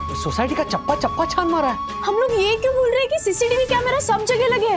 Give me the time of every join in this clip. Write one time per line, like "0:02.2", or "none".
0:01.9